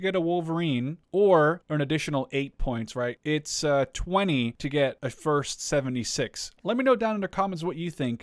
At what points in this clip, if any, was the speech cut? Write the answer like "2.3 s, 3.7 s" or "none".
1.0 s, 1.6 s, 3.2 s, 4.8 s